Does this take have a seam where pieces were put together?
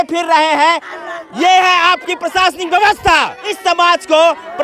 yes; 2 cuts; at 0.9 s, 3.4 s

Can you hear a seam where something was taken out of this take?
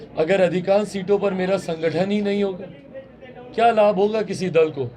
no; 0 cuts

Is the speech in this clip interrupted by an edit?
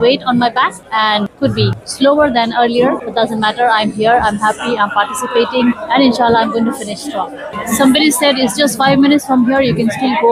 no; 0 cuts

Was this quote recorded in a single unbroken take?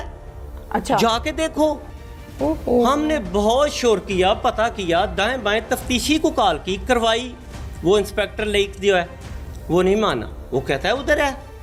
yes; 0 cuts

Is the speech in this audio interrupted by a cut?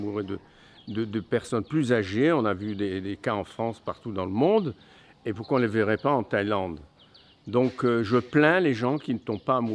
no; 0 cuts

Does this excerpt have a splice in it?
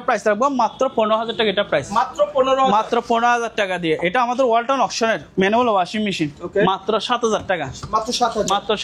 no; 0 cuts

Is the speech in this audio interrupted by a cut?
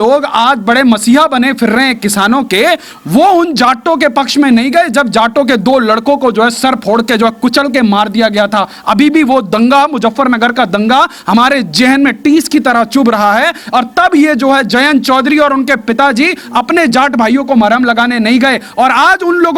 no; 0 cuts

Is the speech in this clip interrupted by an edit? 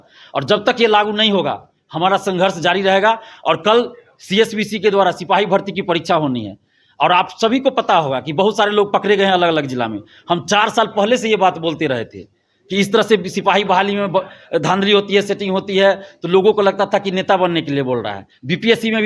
no; 0 cuts

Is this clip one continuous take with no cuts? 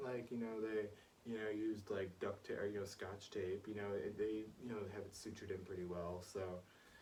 yes; 0 cuts

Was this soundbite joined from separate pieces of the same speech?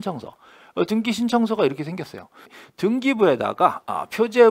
yes; 1 cut; at 2.5 s

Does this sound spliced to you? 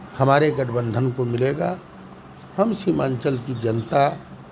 no; 0 cuts

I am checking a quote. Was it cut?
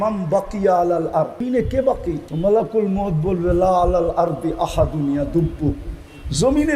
yes; 2 cuts; at 1.4 s, 2.3 s

